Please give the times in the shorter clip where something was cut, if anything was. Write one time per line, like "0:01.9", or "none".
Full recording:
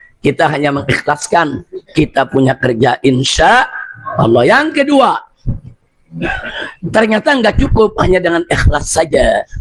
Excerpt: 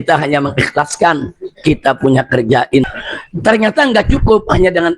0:02.9

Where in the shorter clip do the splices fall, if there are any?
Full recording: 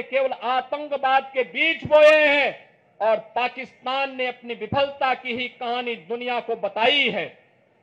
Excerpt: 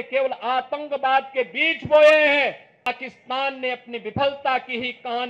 0:02.9

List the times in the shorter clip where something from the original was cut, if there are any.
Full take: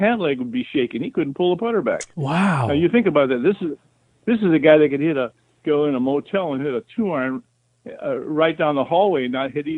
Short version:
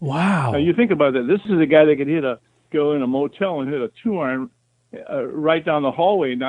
0:01.5

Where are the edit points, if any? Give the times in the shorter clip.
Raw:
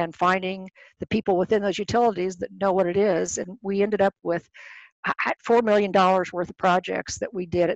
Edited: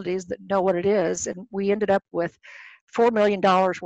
0:02.8

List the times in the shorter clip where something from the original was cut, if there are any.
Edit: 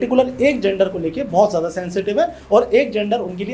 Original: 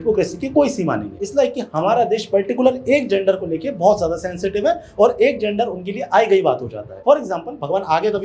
none

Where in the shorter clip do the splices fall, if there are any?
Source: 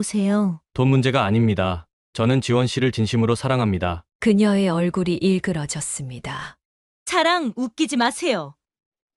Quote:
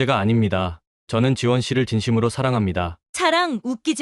0:03.0

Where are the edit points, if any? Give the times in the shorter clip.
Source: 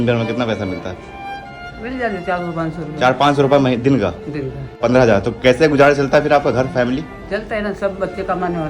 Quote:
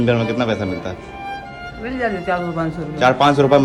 none

